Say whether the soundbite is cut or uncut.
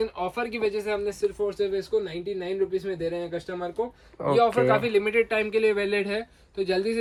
uncut